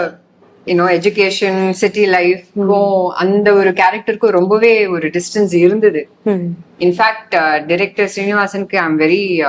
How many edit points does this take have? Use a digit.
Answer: 0